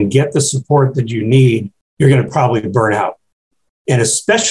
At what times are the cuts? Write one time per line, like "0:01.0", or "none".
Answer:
0:01.8